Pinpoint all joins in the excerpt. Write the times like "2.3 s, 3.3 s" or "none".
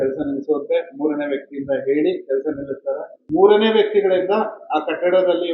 3.1 s